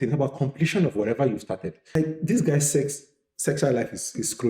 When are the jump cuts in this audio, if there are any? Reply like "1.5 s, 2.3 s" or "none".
1.9 s